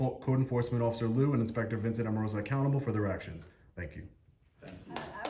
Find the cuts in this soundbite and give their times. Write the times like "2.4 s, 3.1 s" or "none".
none